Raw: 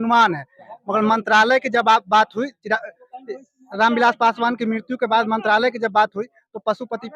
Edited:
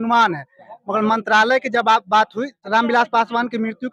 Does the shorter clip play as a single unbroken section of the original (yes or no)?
no